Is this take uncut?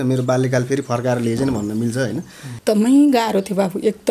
no; 1 cut; at 2.5 s

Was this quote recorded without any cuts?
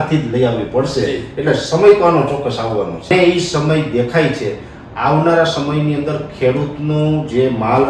no; 1 cut; at 3.1 s

